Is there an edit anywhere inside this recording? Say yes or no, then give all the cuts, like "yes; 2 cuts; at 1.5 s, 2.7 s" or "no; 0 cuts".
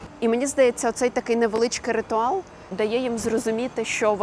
yes; 1 cut; at 2.6 s